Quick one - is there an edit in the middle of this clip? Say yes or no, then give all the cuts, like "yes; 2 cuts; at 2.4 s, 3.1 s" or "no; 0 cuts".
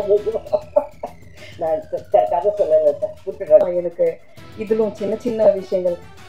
yes; 1 cut; at 3.6 s